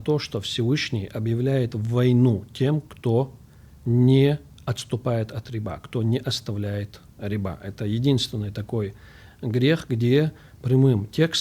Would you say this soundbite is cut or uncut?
uncut